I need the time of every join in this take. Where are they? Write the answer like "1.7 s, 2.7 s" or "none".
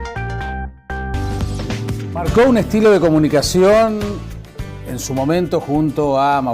1.1 s